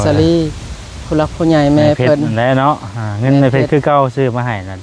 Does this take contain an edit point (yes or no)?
no